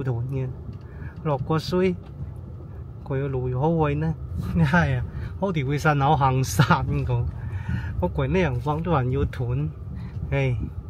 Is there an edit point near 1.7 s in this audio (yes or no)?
no